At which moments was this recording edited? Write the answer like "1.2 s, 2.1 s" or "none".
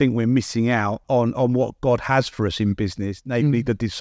1.0 s

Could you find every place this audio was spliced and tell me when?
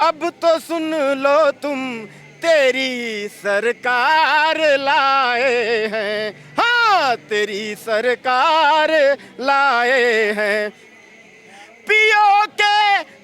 none

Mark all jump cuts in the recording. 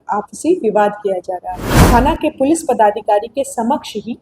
1.7 s

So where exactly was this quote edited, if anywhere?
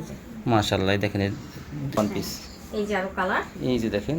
2.0 s

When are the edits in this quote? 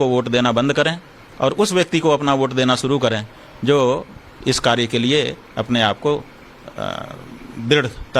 4.0 s

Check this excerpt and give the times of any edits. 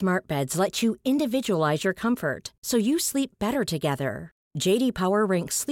none

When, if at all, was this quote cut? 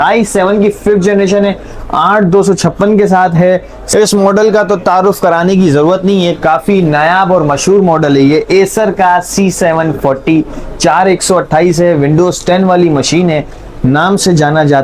3.8 s

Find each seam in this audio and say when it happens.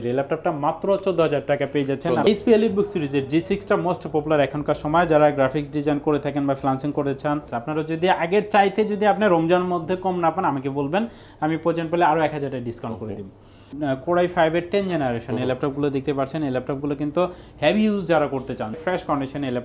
2.3 s, 7.5 s, 13.6 s, 18.8 s

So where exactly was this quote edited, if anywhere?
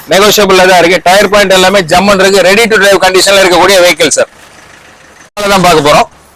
5.3 s

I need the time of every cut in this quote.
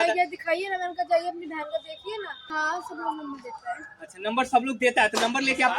2.4 s

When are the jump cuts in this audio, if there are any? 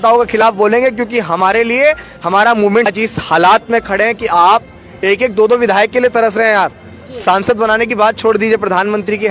2.9 s

